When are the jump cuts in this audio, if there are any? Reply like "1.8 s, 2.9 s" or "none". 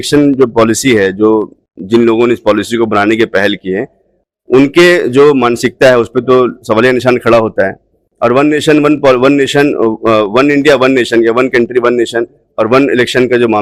none

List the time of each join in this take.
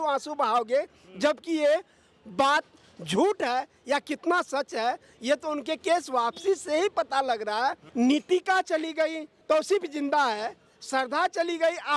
7.8 s, 9.4 s

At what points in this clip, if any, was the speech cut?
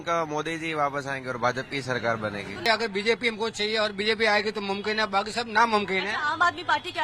2.7 s

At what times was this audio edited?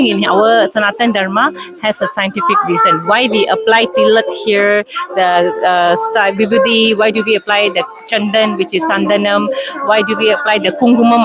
none

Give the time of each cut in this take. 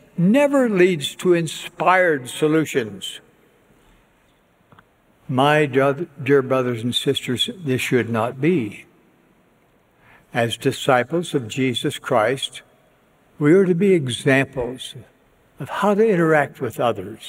4.3 s

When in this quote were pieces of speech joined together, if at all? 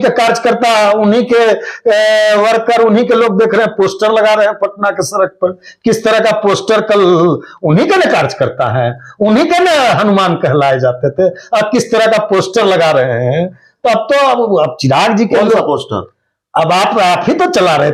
none

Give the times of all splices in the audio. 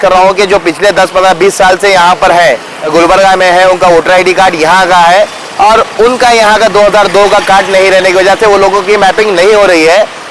2.7 s

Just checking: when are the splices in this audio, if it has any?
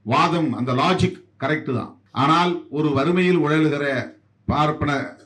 2.0 s

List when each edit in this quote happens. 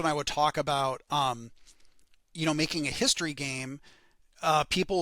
none

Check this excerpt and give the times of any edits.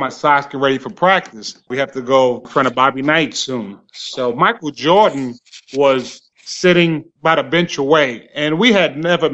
1.7 s, 2.4 s

